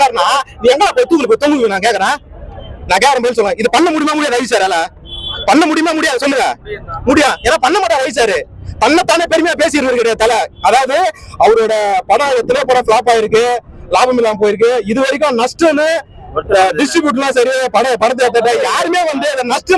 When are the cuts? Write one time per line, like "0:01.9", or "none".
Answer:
none